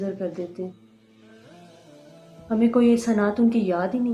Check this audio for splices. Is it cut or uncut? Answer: cut